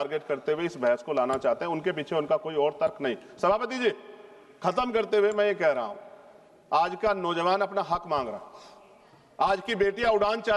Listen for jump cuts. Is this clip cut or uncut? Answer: uncut